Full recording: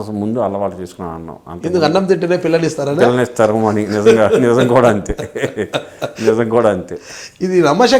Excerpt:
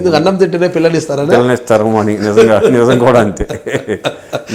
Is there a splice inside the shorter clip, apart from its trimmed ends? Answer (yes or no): no